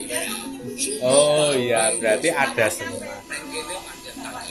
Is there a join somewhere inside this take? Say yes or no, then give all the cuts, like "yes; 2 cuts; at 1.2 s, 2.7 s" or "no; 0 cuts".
no; 0 cuts